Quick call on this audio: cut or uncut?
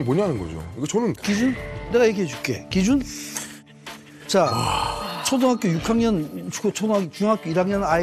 uncut